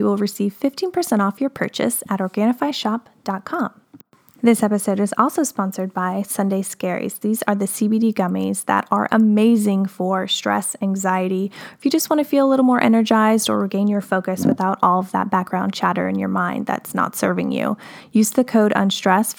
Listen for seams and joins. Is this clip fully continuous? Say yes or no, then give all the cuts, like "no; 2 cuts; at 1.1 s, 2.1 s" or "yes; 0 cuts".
yes; 0 cuts